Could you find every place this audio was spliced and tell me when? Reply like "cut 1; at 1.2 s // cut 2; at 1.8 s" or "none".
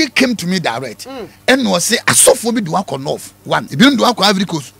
cut 1; at 3.7 s